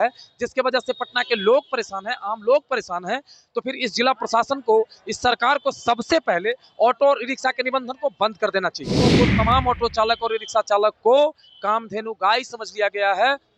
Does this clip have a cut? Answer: yes; 1 cut; at 9.1 s

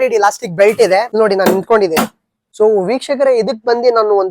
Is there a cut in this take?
yes; 2 cuts; at 1.1 s, 2.6 s

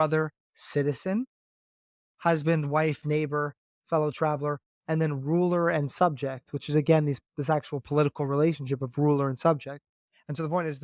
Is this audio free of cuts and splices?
yes; 0 cuts

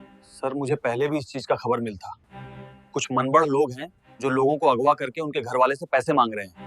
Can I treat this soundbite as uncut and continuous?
yes; 0 cuts

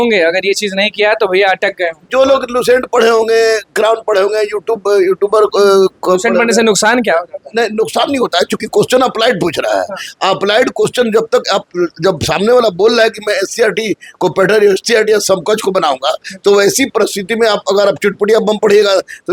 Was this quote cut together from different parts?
no; 0 cuts

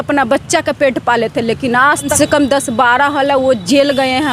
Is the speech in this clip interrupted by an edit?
yes; 1 cut; at 2.1 s

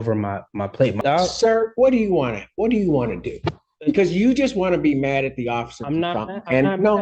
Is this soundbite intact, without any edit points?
no; 1 cut; at 1.0 s

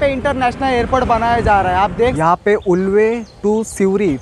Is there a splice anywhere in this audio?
yes; 1 cut; at 2.2 s

